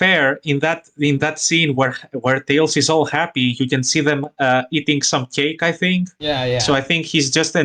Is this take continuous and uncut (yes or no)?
yes